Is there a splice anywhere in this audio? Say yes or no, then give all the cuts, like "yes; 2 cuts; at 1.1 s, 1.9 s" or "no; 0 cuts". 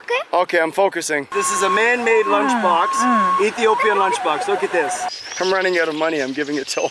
yes; 2 cuts; at 1.3 s, 5.1 s